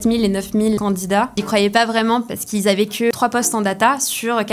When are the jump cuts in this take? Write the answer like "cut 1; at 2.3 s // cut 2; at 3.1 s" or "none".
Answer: cut 1; at 1.2 s // cut 2; at 3.1 s